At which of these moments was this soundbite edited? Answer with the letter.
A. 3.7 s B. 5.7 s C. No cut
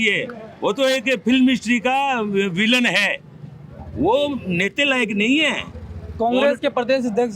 C